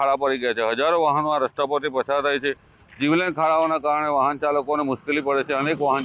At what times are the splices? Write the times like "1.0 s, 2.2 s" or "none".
none